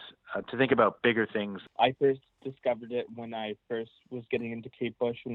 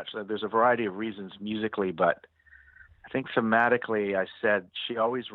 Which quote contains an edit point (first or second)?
first